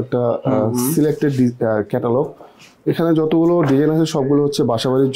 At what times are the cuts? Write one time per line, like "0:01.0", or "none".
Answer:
none